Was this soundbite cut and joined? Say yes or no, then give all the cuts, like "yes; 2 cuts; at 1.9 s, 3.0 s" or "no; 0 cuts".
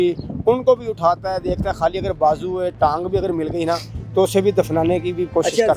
no; 0 cuts